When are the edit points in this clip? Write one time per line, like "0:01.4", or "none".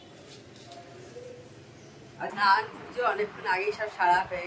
0:02.3